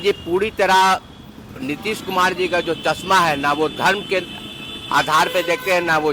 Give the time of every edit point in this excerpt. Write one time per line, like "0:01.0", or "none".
none